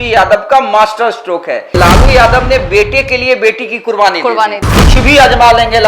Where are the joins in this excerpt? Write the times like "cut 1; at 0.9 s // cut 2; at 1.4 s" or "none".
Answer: cut 1; at 1.7 s // cut 2; at 4.6 s